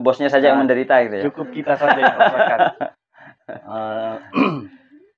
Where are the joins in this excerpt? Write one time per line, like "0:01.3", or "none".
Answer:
none

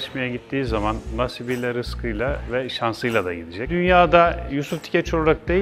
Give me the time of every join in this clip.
0:03.7

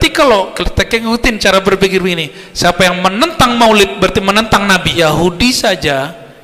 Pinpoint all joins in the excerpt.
0:05.0

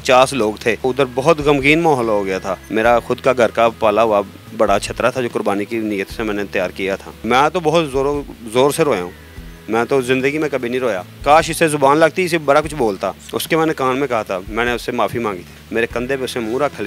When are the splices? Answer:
0:00.8
0:02.6
0:07.1
0:11.1
0:13.3
0:15.6

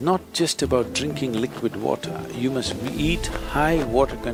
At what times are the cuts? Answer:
none

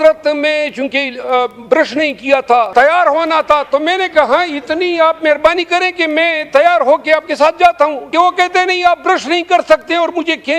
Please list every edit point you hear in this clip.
0:02.7
0:08.0

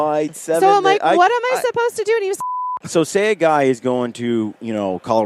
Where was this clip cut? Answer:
0:02.4

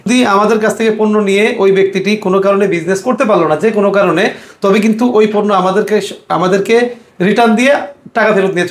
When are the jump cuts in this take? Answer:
none

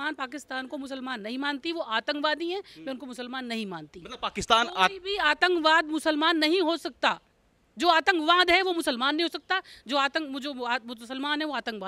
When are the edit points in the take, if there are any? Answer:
none

